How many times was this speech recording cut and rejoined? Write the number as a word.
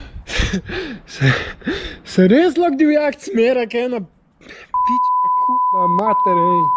zero